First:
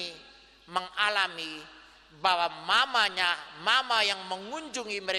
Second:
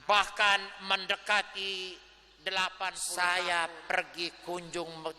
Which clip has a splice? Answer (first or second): second